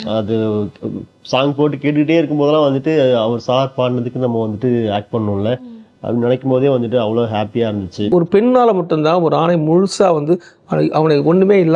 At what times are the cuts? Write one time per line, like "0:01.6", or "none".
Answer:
0:08.1